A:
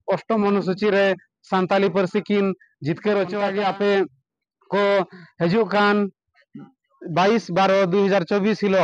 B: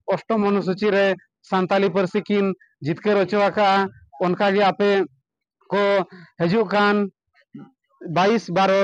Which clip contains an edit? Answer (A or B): A